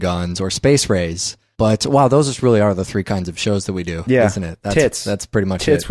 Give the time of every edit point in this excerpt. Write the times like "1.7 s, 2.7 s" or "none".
2.8 s

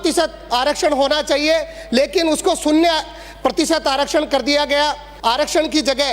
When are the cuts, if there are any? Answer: 5.1 s

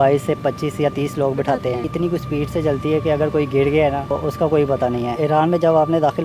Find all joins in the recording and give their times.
1.9 s, 4.1 s, 5.2 s

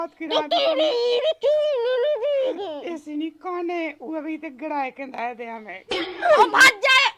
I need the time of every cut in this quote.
none

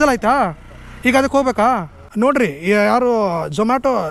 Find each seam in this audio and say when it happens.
2.0 s

